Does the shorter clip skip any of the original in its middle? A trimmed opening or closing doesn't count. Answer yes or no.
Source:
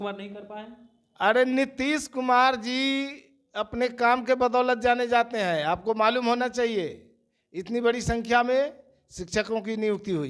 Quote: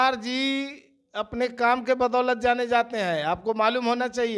no